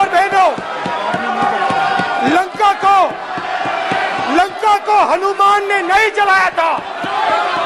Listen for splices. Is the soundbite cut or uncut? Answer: uncut